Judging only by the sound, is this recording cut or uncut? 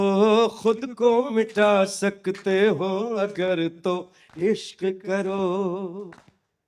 uncut